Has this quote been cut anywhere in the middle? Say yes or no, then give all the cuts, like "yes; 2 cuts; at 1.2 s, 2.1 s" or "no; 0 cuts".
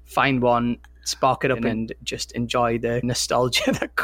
yes; 2 cuts; at 1.6 s, 3.0 s